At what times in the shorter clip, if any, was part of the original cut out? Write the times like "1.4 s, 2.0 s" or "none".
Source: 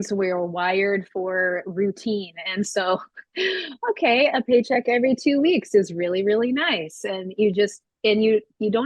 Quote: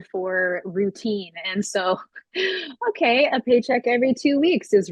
none